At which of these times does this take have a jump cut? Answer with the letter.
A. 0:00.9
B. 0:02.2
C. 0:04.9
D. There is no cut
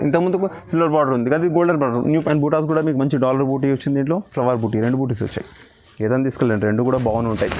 B